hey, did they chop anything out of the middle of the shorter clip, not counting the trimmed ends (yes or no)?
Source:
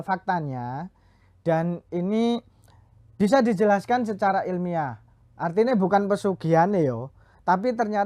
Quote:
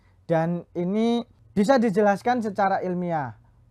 yes